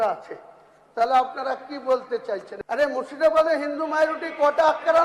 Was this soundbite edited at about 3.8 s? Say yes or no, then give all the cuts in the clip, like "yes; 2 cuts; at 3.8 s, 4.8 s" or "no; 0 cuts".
no; 1 cut; at 2.5 s